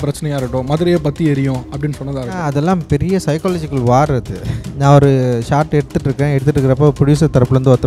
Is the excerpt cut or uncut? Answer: cut